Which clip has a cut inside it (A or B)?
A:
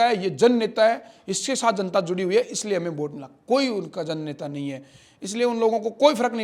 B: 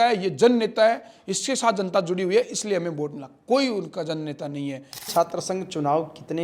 B